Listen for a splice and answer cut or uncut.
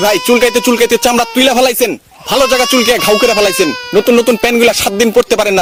uncut